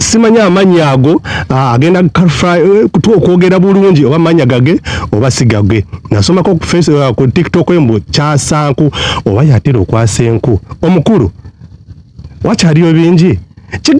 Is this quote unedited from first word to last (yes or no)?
yes